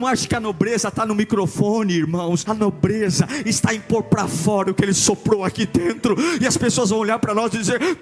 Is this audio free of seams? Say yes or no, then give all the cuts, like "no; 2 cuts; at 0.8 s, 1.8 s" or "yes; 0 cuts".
no; 1 cut; at 2.4 s